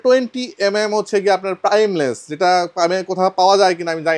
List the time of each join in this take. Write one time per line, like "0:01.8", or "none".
none